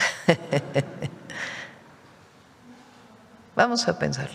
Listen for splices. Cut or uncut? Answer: uncut